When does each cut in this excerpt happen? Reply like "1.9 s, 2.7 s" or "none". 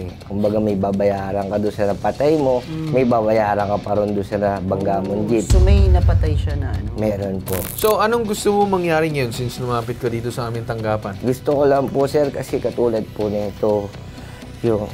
7.7 s